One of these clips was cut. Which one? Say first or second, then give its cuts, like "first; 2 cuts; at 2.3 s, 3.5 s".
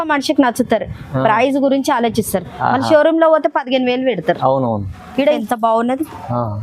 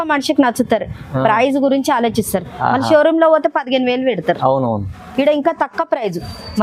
first; 1 cut; at 5.4 s